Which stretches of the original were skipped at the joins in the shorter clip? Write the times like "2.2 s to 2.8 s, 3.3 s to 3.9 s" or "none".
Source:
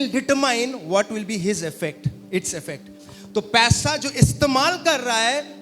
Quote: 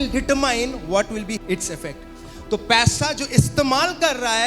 1.4 s to 2.2 s

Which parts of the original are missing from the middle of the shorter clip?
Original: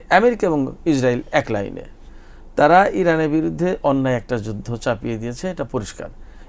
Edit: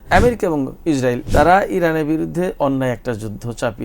1.2 s to 2.5 s

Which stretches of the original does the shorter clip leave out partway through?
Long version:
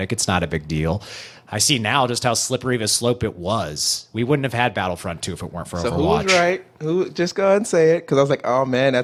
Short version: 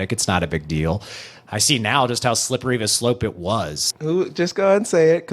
3.9 s to 6.7 s

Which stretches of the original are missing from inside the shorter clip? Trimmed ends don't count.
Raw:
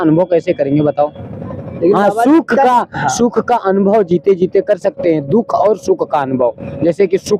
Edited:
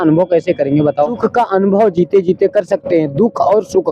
1.2 s to 3.3 s

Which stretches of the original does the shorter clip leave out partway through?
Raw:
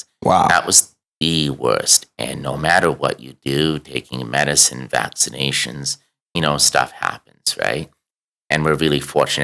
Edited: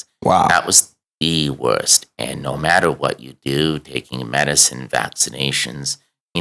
none

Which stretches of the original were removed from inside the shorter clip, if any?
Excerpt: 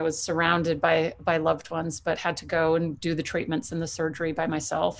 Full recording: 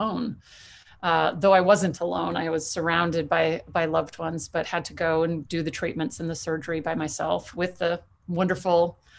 none

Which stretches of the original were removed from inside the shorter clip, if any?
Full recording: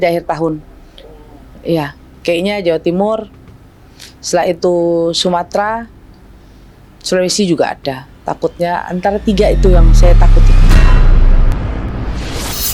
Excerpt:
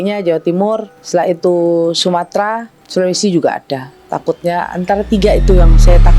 3.3 s to 4.1 s, 5.9 s to 6.9 s

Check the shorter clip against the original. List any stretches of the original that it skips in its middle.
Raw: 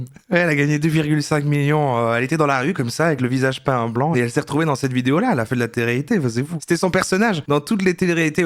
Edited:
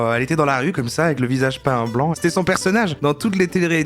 4.1 s to 6.6 s

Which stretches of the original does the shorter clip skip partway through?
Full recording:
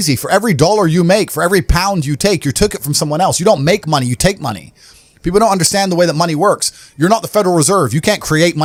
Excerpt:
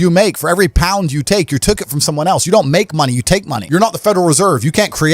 4.5 s to 6.8 s

